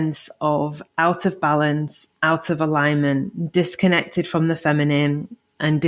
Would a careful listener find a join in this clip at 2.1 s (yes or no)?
no